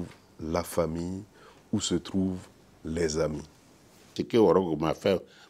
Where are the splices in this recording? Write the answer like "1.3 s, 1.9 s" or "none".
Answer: 4.2 s